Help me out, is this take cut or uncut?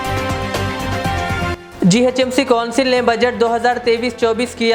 uncut